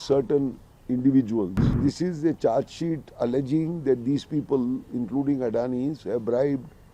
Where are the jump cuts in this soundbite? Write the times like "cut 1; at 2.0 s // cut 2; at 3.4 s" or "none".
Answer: cut 1; at 1.8 s